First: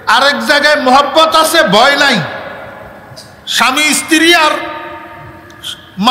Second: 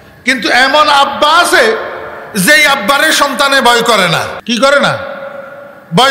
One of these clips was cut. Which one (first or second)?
second